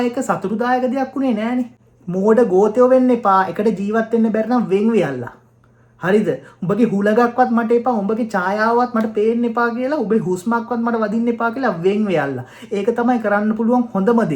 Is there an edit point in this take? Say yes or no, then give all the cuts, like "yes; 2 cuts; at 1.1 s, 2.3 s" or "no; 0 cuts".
yes; 1 cut; at 1.9 s